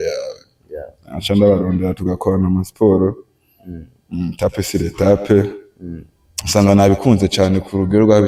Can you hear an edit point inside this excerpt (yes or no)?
no